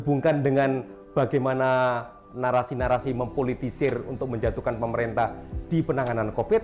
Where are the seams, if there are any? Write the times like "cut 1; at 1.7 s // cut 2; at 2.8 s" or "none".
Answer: none